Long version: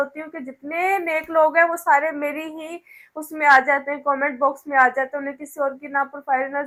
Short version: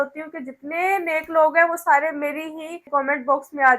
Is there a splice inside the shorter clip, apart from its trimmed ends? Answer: yes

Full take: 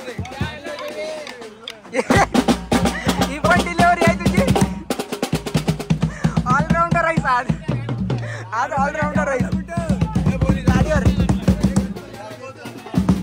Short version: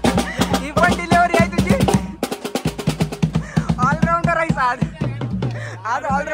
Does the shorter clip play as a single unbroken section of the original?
yes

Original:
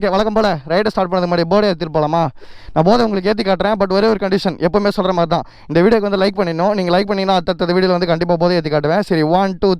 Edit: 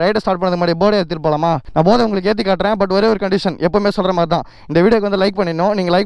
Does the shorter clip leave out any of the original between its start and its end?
yes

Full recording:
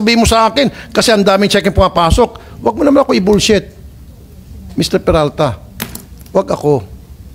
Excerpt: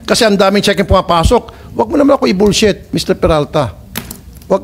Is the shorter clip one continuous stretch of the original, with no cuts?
no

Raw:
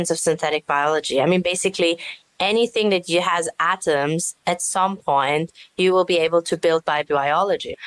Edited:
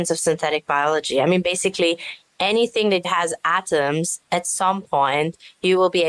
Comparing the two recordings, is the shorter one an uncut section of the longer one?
no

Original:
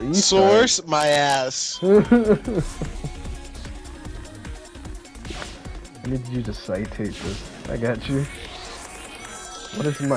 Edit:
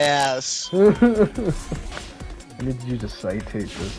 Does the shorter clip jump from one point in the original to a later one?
yes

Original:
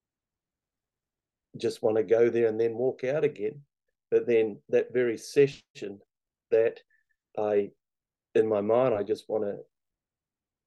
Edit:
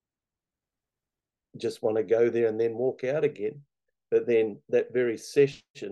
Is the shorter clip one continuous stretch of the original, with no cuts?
yes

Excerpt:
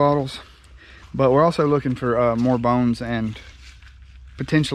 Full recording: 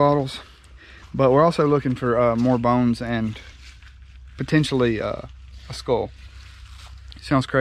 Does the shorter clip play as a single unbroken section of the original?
yes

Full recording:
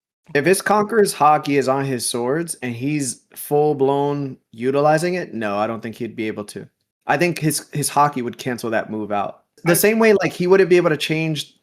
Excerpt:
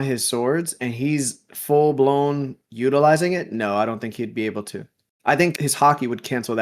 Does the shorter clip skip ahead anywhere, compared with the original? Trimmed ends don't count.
yes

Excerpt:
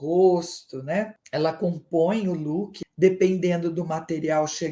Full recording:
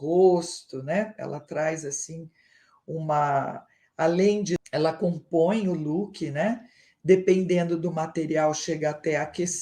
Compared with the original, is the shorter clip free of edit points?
no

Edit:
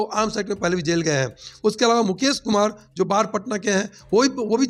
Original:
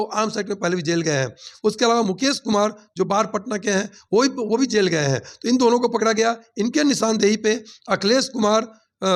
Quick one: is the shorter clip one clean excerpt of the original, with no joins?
yes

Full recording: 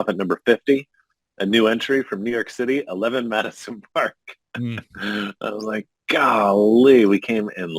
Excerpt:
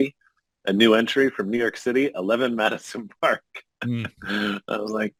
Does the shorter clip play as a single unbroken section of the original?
yes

